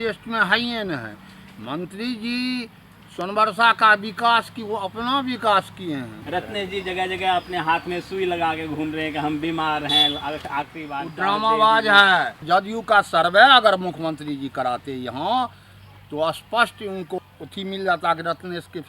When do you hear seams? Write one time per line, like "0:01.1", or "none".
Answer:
0:06.2
0:12.4
0:17.2